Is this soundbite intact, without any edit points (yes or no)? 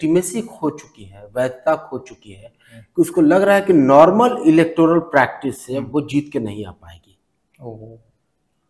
yes